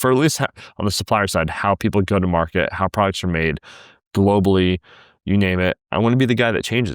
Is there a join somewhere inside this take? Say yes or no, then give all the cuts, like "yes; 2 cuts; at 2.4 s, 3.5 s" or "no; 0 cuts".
no; 0 cuts